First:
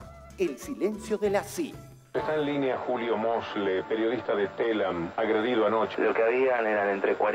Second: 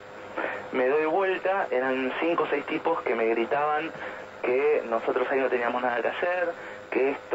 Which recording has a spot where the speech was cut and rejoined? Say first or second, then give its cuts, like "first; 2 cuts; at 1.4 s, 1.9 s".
first; 2 cuts; at 2.0 s, 5.9 s